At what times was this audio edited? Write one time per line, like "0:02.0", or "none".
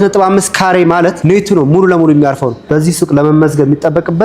0:01.2
0:02.6